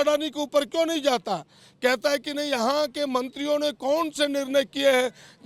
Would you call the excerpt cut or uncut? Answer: uncut